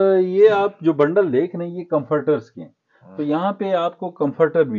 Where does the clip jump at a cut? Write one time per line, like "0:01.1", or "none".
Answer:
none